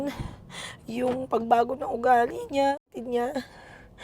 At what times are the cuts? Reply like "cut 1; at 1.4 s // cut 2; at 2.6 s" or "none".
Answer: cut 1; at 2.9 s